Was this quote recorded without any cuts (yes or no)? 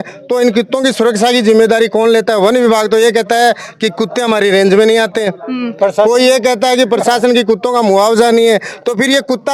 yes